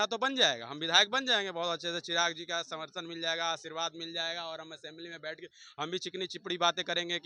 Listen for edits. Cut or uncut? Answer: uncut